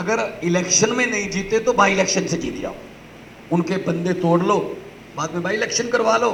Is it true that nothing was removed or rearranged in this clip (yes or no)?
yes